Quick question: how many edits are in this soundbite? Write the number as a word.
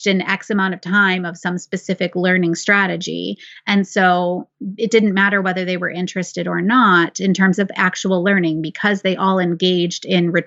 zero